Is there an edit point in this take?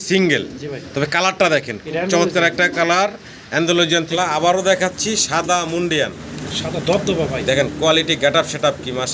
yes; 1 cut; at 4.1 s

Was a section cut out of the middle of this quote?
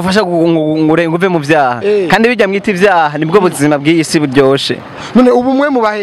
yes; 1 cut; at 4.8 s

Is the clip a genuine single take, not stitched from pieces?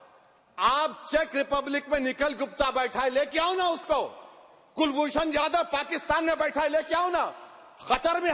yes; 0 cuts

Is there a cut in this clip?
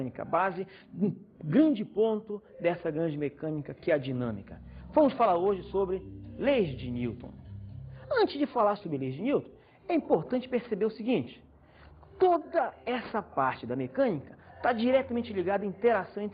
no; 0 cuts

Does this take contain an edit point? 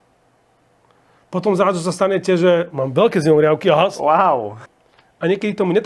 yes; 1 cut; at 4.7 s

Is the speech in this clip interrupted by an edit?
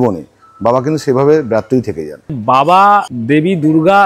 yes; 2 cuts; at 2.4 s, 3.1 s

